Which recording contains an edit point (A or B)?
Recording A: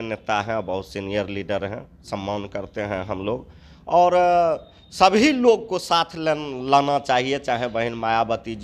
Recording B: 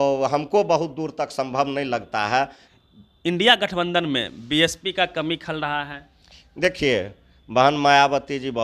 B